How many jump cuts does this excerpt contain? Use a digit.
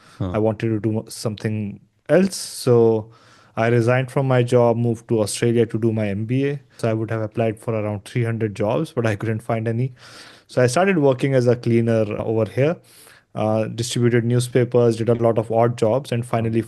2